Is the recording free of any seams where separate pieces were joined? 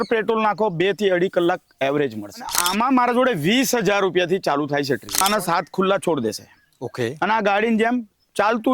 no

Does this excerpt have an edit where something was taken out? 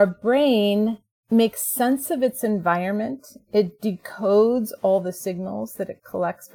yes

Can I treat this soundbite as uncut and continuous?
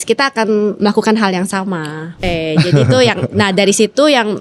no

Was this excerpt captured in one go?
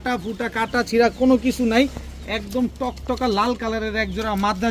yes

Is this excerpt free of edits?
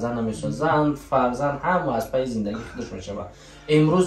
yes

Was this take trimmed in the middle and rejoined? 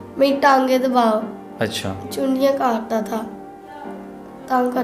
no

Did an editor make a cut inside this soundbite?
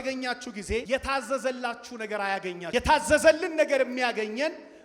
yes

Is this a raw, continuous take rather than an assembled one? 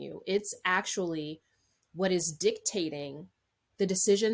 yes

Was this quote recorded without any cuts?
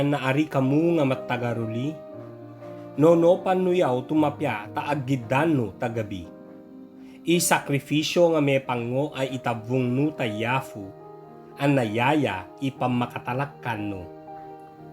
no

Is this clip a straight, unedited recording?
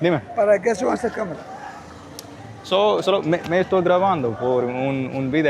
yes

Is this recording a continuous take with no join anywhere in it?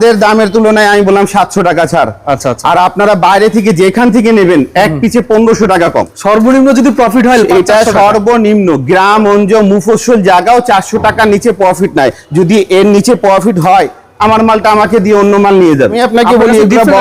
no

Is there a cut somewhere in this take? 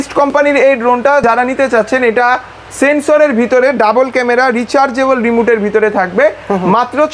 no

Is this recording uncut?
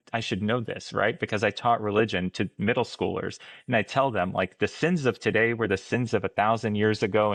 yes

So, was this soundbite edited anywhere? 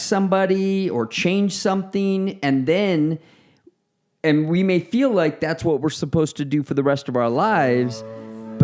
no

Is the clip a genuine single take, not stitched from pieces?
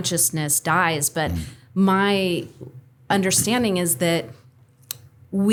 yes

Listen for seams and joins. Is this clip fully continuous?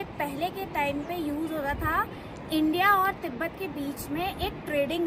yes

